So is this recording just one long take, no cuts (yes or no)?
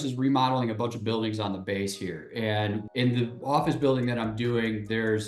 yes